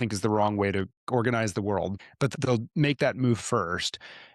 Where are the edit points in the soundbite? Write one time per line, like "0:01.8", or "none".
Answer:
0:01.1
0:02.0